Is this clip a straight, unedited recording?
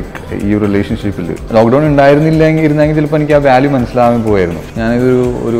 no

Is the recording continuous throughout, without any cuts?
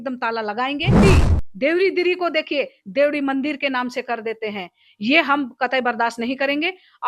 no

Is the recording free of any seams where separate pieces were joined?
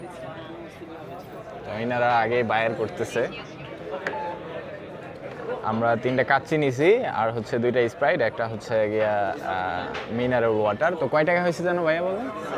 yes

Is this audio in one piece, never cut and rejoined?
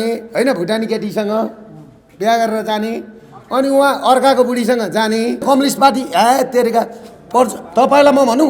no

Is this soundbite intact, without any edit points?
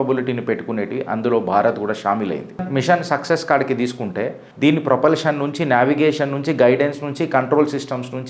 yes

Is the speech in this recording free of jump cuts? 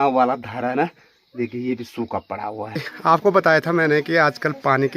no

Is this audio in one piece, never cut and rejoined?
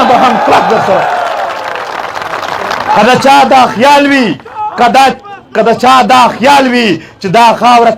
yes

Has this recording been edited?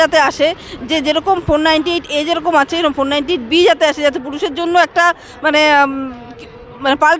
no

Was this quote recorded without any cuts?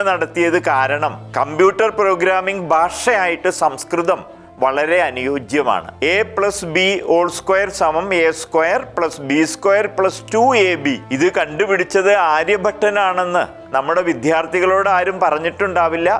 no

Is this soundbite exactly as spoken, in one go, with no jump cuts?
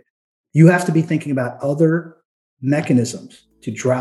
yes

